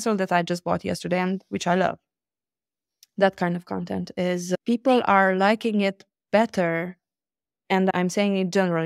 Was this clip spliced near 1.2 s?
no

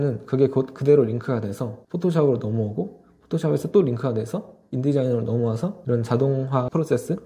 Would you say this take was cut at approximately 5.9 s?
no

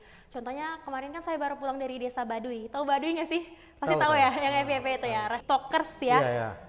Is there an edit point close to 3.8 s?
no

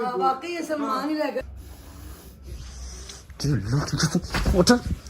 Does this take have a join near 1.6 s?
yes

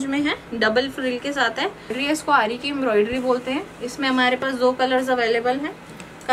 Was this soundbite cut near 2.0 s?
yes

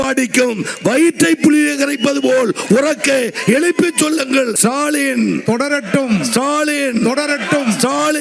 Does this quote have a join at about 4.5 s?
yes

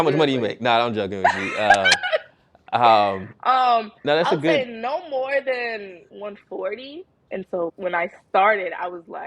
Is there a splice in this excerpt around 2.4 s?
no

